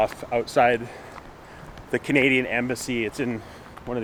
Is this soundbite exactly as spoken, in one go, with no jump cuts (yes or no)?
yes